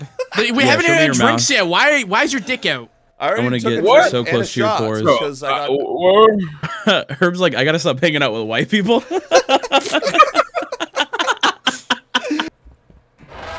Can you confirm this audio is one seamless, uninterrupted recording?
no; 1 cut; at 12.5 s

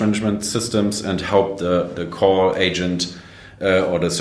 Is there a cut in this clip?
no; 0 cuts

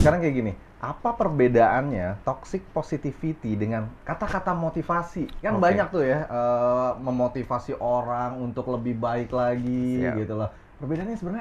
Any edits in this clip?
no; 0 cuts

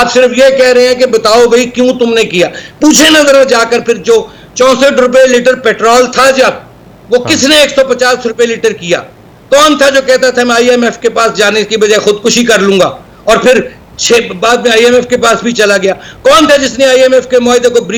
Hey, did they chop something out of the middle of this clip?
no; 0 cuts

